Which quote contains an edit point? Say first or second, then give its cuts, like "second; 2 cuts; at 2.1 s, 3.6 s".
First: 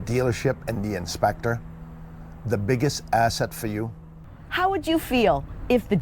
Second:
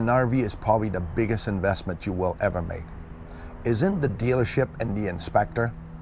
first; 1 cut; at 4.1 s